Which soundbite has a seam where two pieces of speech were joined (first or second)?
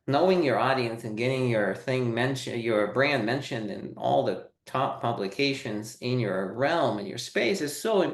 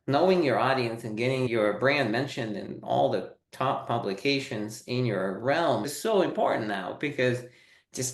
second